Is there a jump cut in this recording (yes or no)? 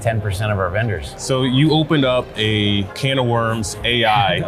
yes